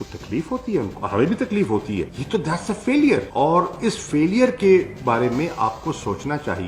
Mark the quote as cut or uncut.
cut